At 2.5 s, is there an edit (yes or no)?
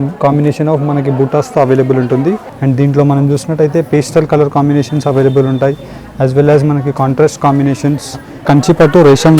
yes